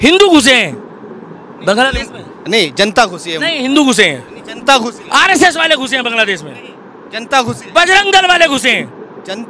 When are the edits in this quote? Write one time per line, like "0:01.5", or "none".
none